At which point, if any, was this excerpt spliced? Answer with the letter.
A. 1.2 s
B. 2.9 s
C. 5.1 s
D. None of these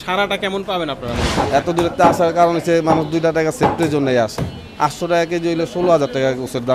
A